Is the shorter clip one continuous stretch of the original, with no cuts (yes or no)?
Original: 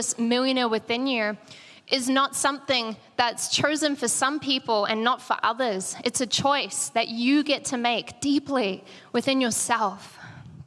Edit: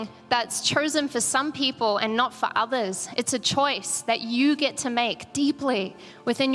yes